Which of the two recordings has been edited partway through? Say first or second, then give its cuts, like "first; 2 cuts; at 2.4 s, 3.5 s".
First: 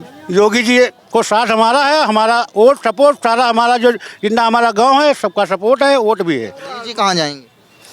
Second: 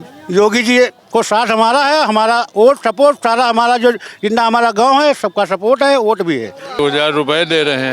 second; 1 cut; at 6.8 s